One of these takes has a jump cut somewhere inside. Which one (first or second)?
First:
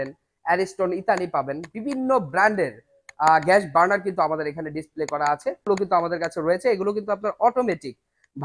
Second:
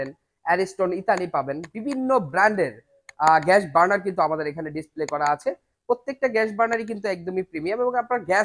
first